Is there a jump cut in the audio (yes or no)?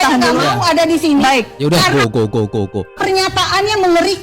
yes